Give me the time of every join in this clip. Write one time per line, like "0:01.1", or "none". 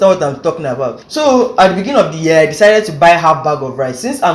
0:01.0